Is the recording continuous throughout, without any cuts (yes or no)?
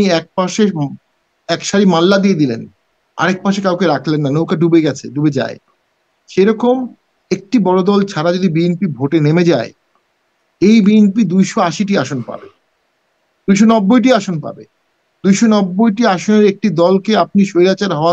yes